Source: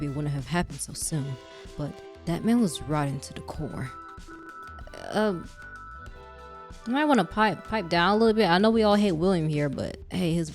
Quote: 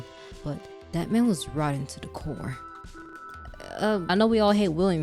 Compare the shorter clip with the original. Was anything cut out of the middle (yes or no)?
yes